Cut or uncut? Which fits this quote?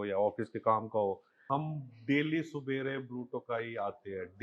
cut